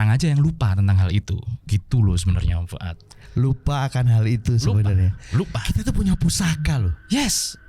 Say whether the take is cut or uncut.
uncut